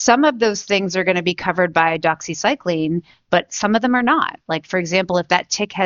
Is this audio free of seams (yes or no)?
yes